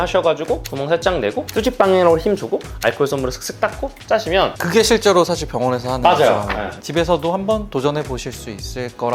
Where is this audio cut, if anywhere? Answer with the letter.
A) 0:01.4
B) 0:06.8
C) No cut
B